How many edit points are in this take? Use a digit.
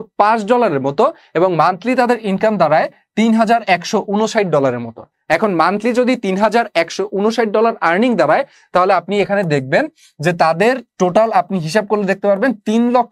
0